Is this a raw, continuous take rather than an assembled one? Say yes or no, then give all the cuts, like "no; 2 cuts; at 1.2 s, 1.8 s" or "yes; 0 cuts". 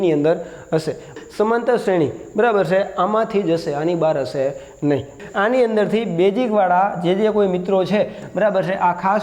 no; 2 cuts; at 1.1 s, 5.2 s